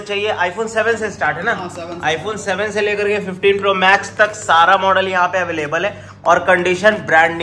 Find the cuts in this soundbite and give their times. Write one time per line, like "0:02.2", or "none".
none